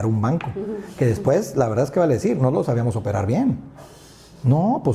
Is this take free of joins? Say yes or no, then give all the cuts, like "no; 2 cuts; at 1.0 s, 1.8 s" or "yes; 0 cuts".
yes; 0 cuts